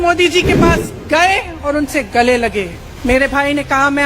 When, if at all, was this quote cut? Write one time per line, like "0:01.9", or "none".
0:02.8

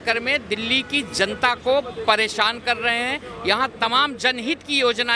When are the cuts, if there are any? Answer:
none

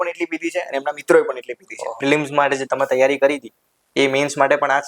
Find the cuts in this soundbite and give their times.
0:01.9

